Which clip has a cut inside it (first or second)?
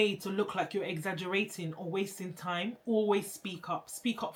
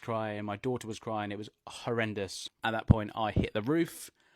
second